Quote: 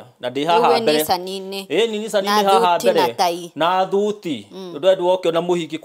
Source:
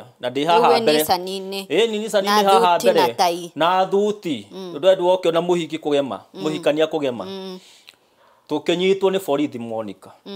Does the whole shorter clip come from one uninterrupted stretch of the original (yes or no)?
yes